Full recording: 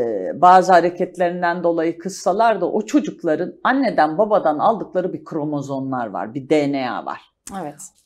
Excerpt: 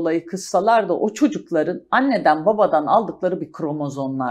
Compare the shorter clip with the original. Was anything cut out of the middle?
no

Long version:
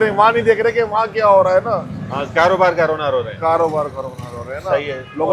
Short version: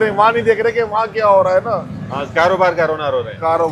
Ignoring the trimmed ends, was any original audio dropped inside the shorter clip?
no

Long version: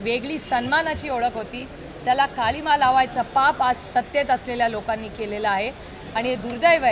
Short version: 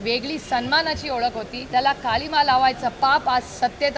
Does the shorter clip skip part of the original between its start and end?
yes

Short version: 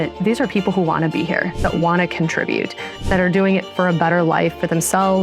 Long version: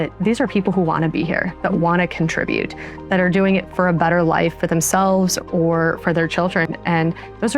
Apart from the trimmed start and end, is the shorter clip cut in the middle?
no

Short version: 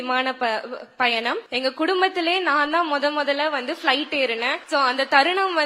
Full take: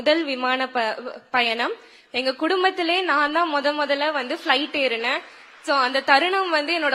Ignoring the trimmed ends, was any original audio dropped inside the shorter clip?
yes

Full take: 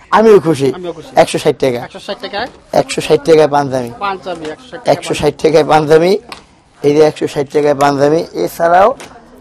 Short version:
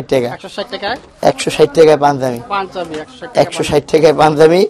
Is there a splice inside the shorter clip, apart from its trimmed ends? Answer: no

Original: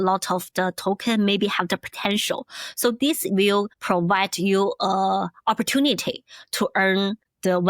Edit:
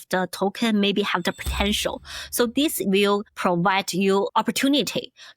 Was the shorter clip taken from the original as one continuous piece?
no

